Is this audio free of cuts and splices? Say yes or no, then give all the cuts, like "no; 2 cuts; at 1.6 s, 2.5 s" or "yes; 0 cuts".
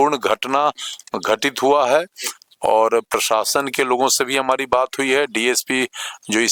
yes; 0 cuts